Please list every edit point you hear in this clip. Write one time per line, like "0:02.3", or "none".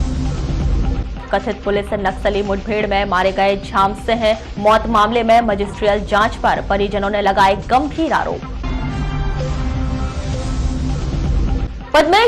0:01.0